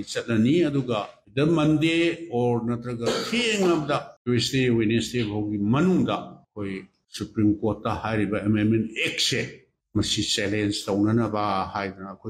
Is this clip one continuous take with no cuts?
yes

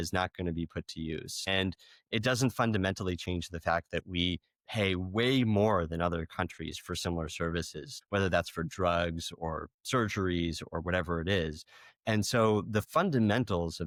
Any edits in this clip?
no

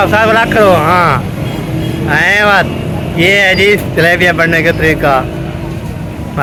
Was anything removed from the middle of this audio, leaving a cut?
no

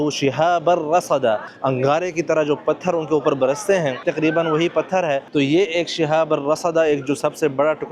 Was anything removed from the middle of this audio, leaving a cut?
yes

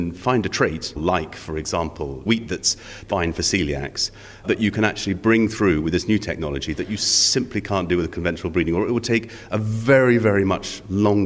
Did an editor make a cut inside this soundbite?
yes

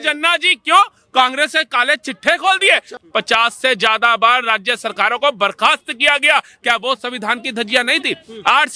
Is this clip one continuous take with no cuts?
no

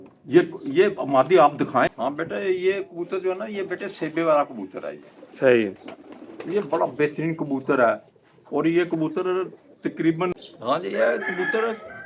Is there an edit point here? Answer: yes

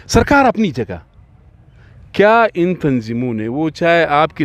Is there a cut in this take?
no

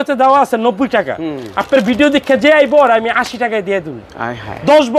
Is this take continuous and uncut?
yes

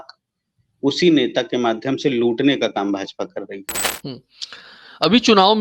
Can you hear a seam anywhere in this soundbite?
yes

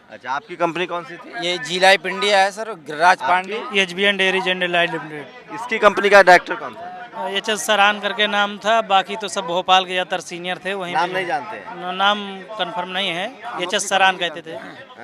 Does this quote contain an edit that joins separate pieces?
no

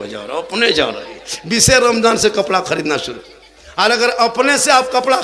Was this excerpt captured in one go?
yes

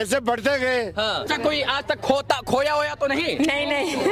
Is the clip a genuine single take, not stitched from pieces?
no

